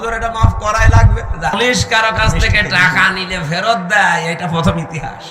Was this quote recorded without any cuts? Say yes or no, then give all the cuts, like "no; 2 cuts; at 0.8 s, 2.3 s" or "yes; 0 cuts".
no; 1 cut; at 1.5 s